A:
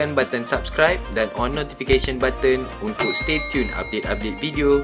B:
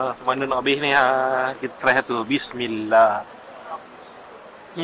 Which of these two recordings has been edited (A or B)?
B